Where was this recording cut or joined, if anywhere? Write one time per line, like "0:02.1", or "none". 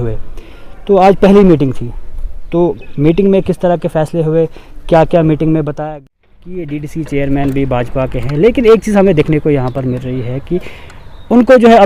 0:05.8